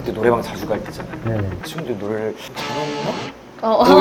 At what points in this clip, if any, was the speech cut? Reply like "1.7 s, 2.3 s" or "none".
none